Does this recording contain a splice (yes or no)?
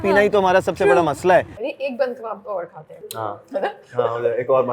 yes